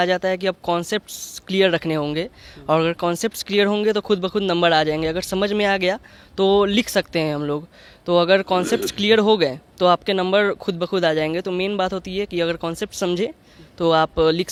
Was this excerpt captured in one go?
yes; 0 cuts

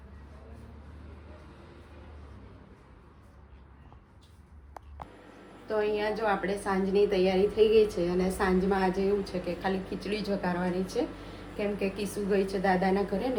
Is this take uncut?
yes; 0 cuts

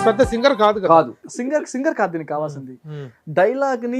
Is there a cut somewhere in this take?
yes; 1 cut; at 1.2 s

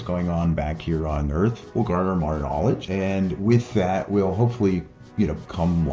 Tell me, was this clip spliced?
yes; 2 cuts; at 1.6 s, 2.8 s

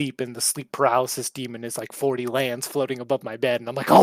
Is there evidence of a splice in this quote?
no; 0 cuts

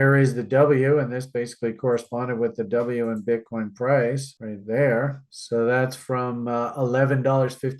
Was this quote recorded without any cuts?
no; 1 cut; at 5.2 s

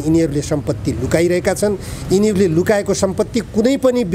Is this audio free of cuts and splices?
yes; 0 cuts

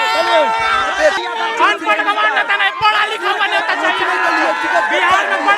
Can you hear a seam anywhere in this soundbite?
yes; 1 cut; at 1.1 s

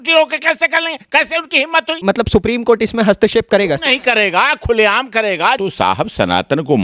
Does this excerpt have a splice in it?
yes; 2 cuts; at 2.0 s, 5.6 s

